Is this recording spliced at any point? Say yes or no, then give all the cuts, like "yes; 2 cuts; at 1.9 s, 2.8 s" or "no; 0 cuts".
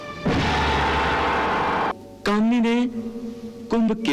yes; 1 cut; at 1.9 s